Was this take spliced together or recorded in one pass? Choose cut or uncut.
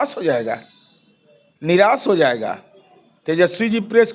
uncut